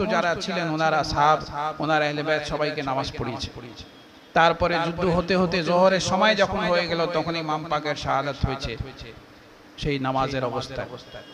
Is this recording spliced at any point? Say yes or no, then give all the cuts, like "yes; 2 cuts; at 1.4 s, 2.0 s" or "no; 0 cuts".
no; 0 cuts